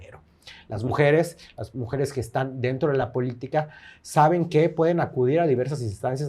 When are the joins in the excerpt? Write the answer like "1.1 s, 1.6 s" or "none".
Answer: none